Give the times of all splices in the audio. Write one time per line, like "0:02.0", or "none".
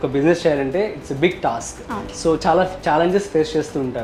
none